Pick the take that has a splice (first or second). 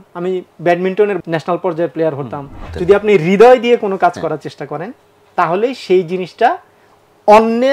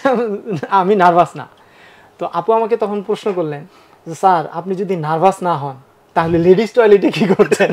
first